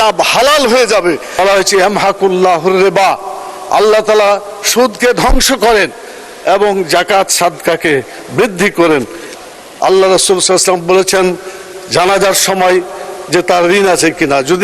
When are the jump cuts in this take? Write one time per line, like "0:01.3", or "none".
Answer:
0:01.3
0:09.2